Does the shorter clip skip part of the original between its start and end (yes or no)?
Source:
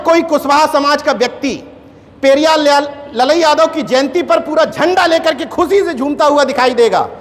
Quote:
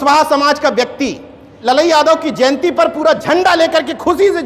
yes